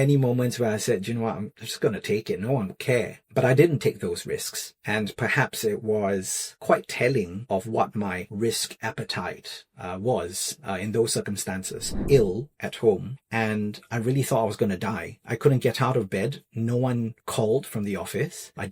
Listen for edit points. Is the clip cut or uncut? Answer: cut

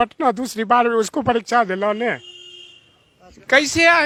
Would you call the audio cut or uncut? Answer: uncut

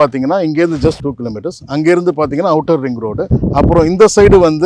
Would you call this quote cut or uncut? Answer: uncut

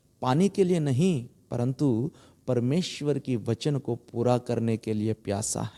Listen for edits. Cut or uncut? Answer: uncut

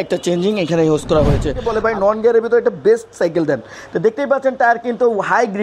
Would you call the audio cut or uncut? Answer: cut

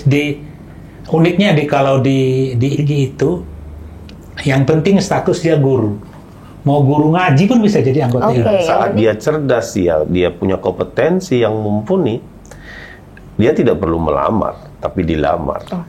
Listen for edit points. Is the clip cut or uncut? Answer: cut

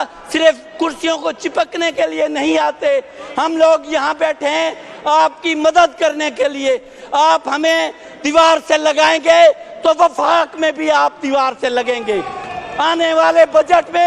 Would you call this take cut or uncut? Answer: uncut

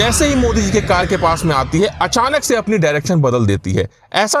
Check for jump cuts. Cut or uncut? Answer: uncut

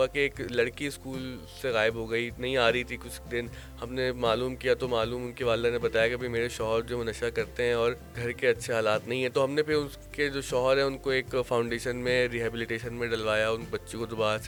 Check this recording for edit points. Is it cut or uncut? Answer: uncut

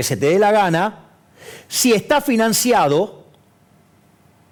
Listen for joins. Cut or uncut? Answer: uncut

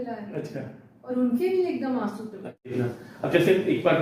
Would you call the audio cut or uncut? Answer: cut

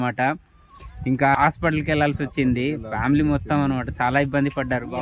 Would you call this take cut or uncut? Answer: cut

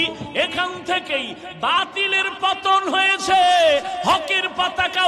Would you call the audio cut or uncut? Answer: uncut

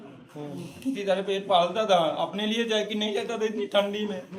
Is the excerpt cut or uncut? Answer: uncut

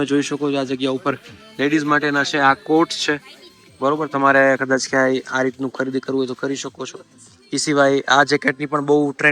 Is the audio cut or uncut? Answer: uncut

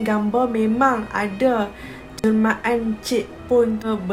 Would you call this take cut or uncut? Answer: uncut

